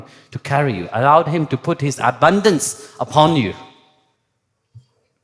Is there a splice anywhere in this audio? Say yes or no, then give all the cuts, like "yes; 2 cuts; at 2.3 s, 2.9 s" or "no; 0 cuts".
no; 0 cuts